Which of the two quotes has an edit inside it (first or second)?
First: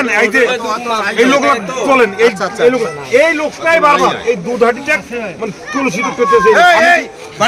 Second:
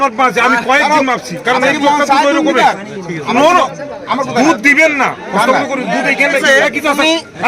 second